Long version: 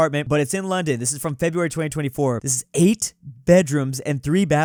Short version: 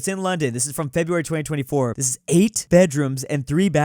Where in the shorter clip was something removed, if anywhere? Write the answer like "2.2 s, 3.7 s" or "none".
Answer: 2.6 s